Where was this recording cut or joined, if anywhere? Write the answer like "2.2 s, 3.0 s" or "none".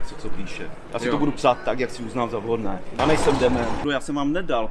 3.0 s, 3.8 s